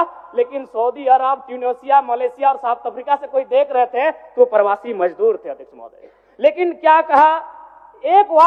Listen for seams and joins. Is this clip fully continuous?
yes; 0 cuts

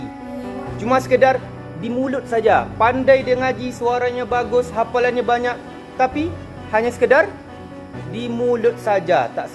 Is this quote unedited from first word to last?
yes; 0 cuts

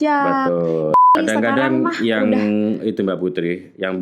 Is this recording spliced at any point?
yes; 1 cut; at 1.0 s

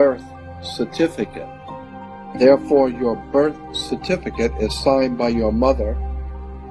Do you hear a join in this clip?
yes; 1 cut; at 1.9 s

